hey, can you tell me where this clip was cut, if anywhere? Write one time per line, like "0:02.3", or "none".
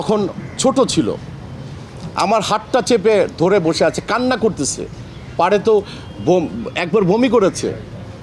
none